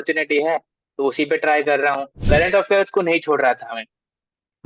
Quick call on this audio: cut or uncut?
cut